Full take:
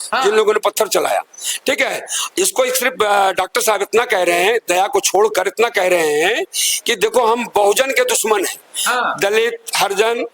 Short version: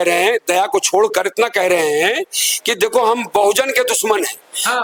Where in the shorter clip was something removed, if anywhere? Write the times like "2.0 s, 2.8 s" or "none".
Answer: none